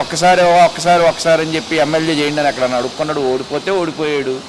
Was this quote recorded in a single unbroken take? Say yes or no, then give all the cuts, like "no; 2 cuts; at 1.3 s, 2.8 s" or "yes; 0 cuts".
yes; 0 cuts